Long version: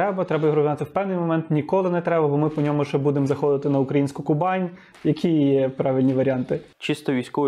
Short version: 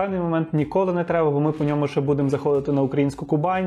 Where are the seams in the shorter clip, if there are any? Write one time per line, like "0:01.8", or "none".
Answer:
none